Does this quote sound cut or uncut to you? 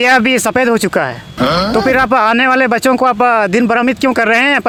uncut